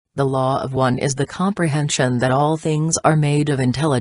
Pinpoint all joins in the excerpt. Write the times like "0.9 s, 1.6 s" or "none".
1.1 s